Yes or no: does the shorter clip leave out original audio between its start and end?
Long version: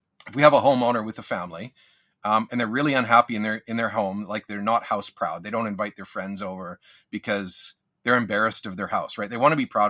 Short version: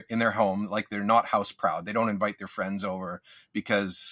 no